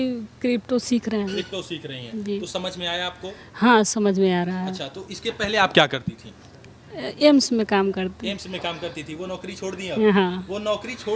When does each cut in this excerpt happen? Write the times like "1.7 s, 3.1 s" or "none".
none